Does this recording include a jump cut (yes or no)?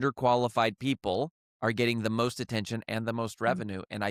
no